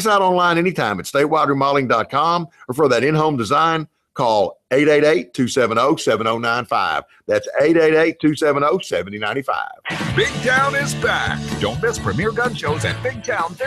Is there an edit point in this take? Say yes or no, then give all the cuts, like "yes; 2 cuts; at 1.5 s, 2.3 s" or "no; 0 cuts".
yes; 2 cuts; at 9.8 s, 12.1 s